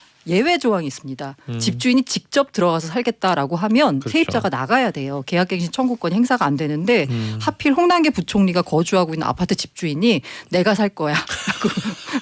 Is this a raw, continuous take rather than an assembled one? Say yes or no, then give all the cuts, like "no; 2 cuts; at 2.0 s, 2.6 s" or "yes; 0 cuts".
yes; 0 cuts